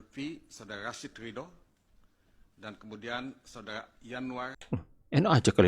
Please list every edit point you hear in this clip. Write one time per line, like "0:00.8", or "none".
0:04.6